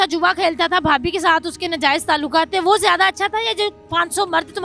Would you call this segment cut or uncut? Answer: uncut